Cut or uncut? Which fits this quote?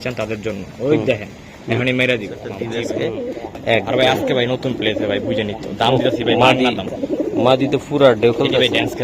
cut